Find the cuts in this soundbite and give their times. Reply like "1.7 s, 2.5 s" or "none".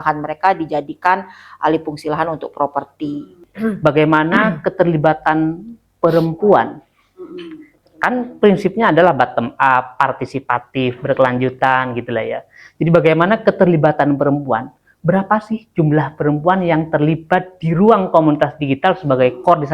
3.4 s